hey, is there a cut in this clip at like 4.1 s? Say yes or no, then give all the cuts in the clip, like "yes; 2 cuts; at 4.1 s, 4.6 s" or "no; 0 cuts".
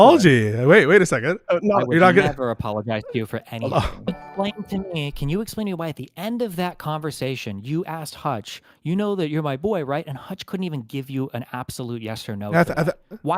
yes; 1 cut; at 4.1 s